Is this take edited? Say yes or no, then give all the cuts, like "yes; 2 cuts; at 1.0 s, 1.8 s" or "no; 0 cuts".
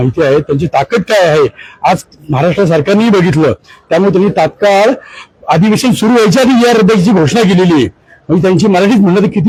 no; 0 cuts